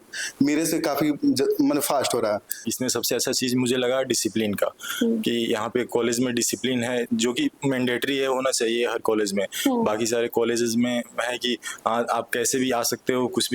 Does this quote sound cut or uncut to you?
cut